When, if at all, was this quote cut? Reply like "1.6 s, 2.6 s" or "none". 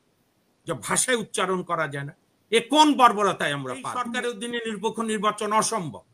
4.1 s